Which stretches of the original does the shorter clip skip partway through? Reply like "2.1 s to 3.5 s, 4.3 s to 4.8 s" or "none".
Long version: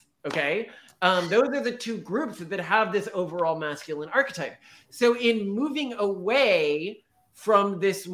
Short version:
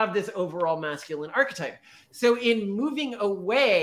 none